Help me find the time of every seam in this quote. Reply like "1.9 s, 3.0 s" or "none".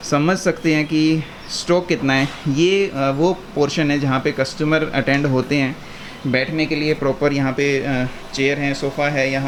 none